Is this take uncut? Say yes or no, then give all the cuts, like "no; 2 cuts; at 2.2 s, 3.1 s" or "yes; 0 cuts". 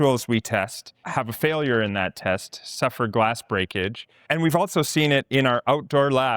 no; 2 cuts; at 1.1 s, 4.2 s